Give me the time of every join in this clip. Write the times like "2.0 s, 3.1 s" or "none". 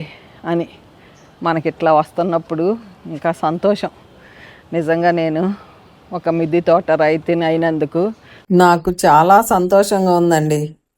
8.3 s